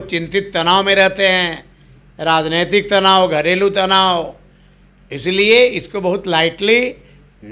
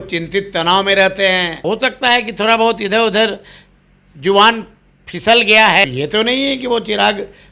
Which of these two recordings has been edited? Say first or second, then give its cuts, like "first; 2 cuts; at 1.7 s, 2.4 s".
second; 2 cuts; at 1.6 s, 5.8 s